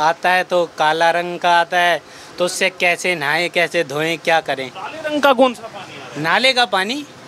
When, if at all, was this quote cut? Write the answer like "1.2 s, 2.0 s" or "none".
none